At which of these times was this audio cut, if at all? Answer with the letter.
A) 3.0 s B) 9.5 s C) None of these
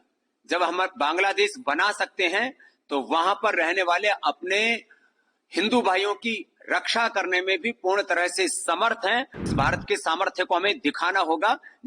B